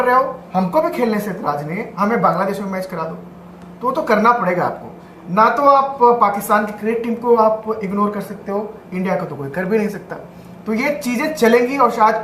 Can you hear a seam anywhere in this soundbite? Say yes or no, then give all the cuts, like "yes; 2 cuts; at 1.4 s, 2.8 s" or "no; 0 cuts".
no; 0 cuts